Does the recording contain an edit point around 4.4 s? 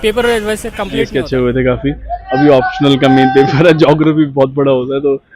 no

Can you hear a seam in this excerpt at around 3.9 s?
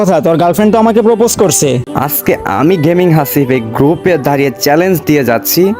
no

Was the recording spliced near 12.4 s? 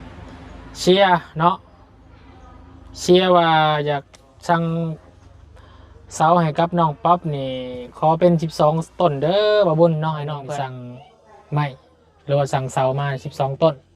no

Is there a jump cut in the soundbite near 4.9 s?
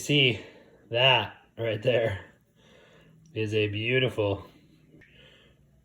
yes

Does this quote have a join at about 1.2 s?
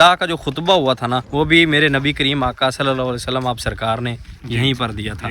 yes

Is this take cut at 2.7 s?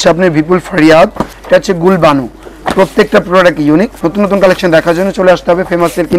no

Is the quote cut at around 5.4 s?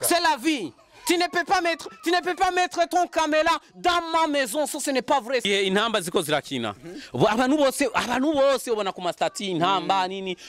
yes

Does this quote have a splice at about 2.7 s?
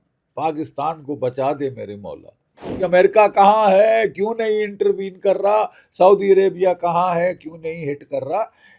yes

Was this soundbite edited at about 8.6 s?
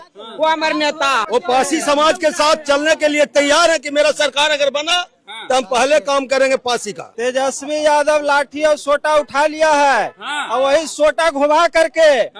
no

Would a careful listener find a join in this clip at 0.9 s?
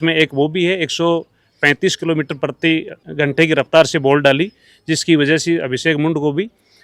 no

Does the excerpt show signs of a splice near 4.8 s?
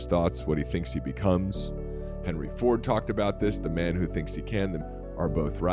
yes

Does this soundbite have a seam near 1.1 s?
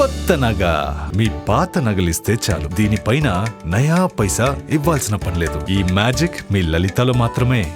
yes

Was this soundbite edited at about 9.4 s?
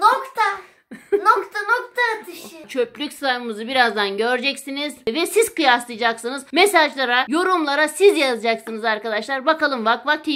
no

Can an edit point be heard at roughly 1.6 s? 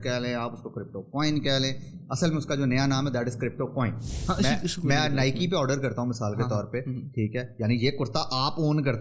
no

